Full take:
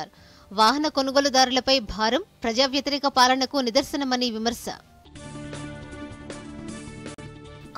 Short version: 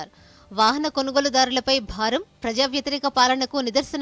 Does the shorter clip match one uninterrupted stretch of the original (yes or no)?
yes